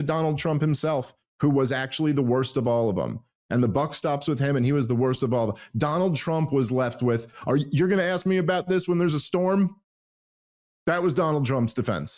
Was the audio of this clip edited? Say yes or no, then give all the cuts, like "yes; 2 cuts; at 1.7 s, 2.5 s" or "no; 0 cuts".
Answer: no; 0 cuts